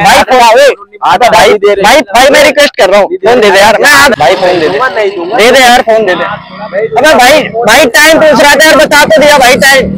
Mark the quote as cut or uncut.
cut